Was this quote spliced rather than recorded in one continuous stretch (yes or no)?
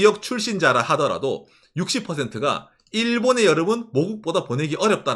no